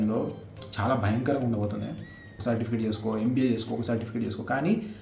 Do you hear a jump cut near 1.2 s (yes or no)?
no